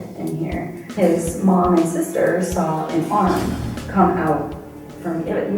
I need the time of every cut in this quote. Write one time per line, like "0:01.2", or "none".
0:00.9